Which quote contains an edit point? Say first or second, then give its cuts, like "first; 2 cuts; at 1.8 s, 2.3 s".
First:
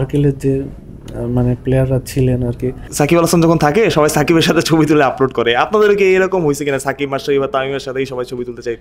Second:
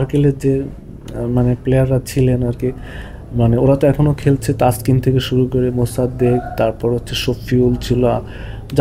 first; 1 cut; at 2.8 s